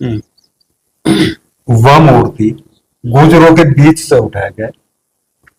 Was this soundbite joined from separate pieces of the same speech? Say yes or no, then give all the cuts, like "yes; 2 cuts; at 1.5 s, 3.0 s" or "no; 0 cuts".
no; 0 cuts